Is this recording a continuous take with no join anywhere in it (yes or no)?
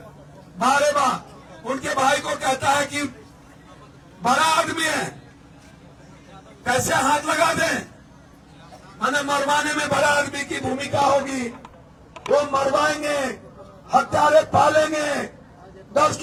yes